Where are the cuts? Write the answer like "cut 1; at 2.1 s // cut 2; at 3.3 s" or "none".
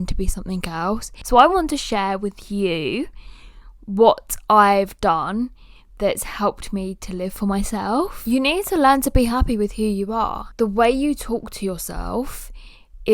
cut 1; at 1.1 s // cut 2; at 8.2 s // cut 3; at 10.4 s